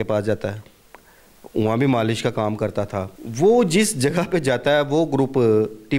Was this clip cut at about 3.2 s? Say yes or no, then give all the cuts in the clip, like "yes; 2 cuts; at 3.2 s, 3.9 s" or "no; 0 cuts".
yes; 1 cut; at 3.2 s